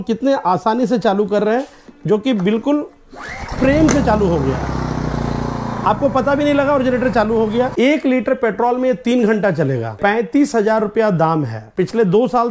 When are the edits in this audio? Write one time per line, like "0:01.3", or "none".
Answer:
0:07.7
0:09.9
0:11.7